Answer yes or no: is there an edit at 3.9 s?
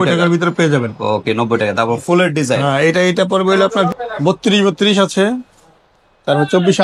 yes